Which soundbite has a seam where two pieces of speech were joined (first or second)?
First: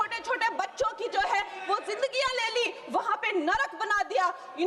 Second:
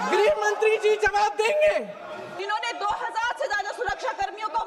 second